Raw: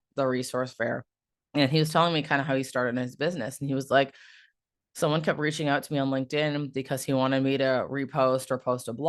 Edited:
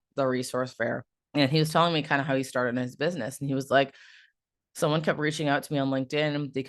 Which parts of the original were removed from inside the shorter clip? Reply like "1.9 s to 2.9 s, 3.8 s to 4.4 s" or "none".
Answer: 1.1 s to 1.3 s